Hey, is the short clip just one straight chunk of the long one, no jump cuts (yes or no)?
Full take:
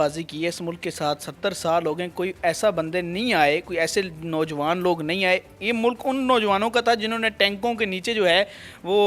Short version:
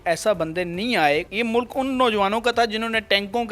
no